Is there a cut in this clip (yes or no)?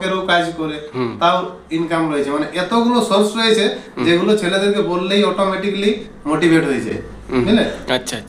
no